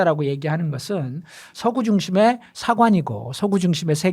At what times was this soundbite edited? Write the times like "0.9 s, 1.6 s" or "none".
none